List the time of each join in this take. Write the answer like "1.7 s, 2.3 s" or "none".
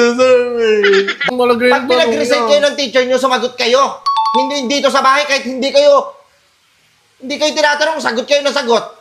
1.3 s